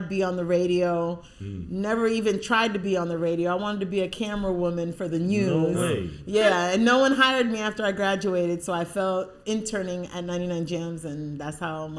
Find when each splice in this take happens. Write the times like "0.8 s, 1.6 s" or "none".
none